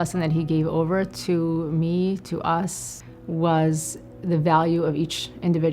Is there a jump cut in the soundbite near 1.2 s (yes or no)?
no